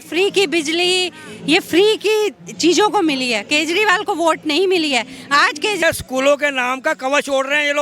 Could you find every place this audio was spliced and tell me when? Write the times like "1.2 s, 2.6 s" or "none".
5.8 s